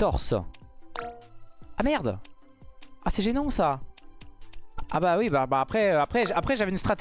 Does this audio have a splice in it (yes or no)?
no